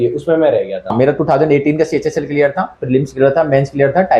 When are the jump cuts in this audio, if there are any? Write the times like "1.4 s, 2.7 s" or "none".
0.9 s